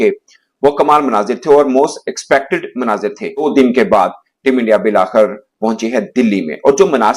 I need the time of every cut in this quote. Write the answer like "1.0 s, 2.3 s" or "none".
3.4 s